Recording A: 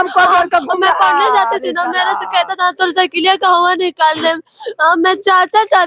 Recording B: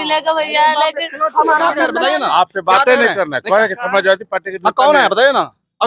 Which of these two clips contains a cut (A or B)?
B